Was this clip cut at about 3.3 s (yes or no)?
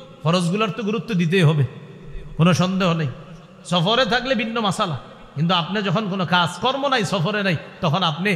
no